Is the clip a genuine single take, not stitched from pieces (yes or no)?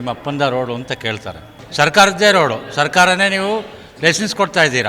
no